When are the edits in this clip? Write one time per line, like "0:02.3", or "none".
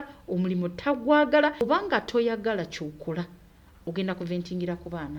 0:01.6